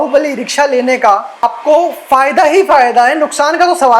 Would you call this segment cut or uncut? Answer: cut